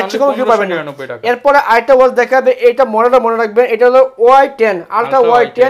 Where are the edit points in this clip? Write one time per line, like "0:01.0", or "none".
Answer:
none